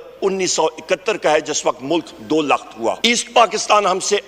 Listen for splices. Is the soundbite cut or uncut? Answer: uncut